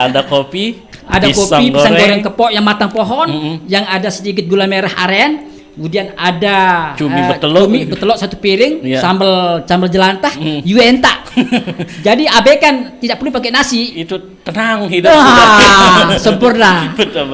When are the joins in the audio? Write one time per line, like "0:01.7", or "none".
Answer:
none

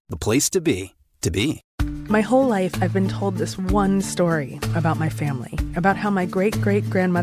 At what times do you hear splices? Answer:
0:01.7

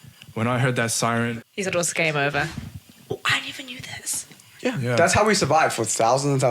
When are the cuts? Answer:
0:01.3
0:02.5

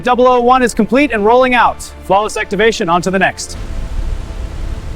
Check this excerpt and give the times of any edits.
0:03.5

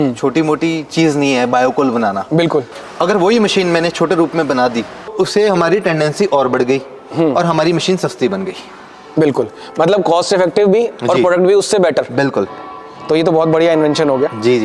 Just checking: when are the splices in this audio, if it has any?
0:02.7
0:05.1

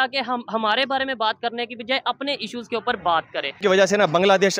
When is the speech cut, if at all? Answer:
0:03.6

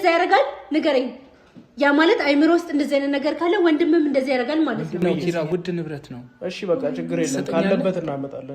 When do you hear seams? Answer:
0:05.0

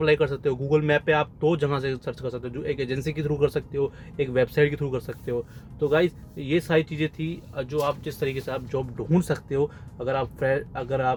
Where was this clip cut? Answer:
none

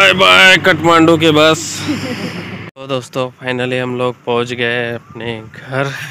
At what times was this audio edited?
none

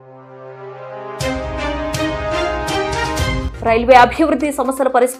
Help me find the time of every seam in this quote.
0:03.4

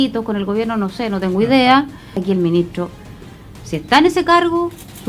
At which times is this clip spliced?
0:02.2

